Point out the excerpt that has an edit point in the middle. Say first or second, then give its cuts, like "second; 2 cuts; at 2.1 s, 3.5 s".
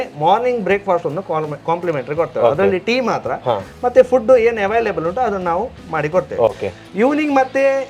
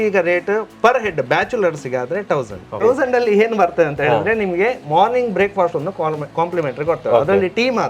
second; 1 cut; at 2.7 s